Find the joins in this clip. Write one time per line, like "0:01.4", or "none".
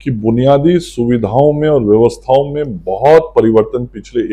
none